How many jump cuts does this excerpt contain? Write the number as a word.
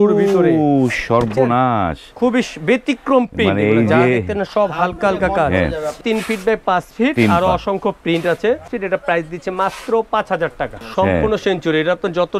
three